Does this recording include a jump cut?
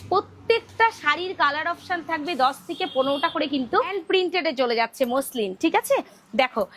yes; 1 cut; at 4.0 s

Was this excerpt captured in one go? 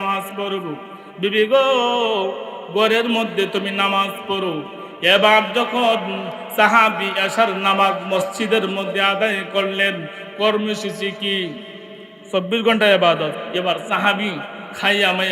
no; 1 cut; at 13.4 s

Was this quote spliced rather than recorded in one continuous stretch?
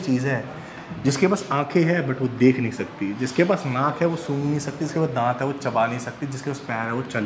no; 0 cuts

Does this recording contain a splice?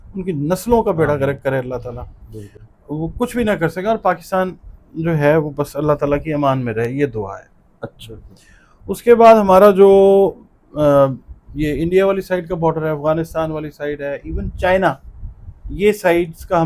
no; 0 cuts

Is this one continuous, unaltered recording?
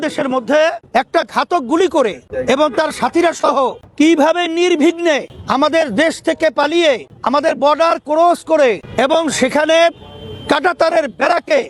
no; 6 cuts; at 0.8 s, 2.3 s, 3.8 s, 5.3 s, 7.1 s, 8.8 s

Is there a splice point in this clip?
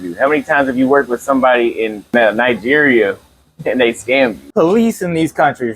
yes; 2 cuts; at 2.1 s, 4.4 s

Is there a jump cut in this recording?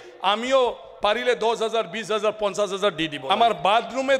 yes; 1 cut; at 3.2 s

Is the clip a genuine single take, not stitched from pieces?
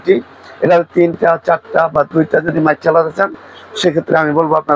yes; 0 cuts

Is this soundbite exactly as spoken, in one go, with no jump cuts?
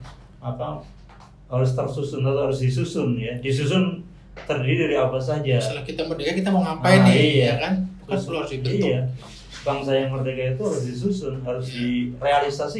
yes; 0 cuts

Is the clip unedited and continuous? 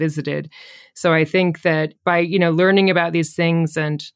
yes; 0 cuts

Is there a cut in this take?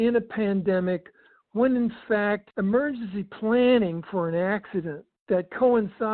yes; 1 cut; at 2.5 s

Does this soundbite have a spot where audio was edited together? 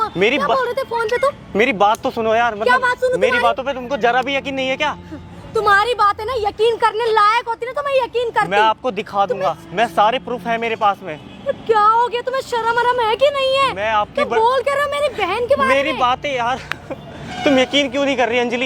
no; 0 cuts

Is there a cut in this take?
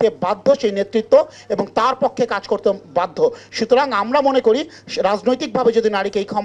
no; 0 cuts

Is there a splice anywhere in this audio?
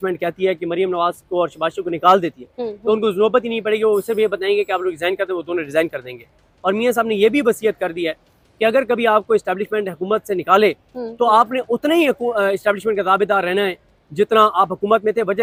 no; 0 cuts

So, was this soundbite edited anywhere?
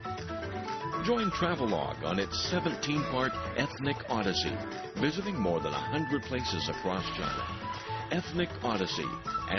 yes; 1 cut; at 6.4 s

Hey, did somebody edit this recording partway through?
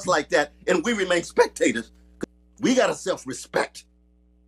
yes; 1 cut; at 2.1 s

